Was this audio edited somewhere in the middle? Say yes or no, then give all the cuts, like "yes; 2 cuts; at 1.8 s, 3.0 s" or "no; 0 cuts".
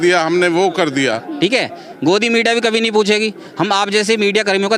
yes; 1 cut; at 1.1 s